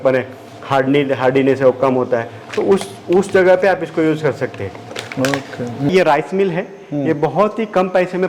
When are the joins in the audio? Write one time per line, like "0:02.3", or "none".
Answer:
0:05.9

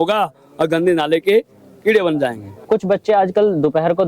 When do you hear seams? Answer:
0:02.6

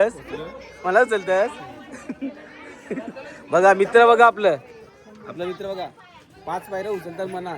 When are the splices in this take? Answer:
none

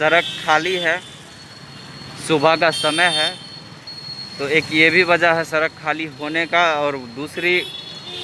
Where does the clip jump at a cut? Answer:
none

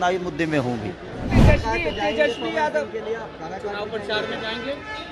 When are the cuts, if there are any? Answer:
0:01.3

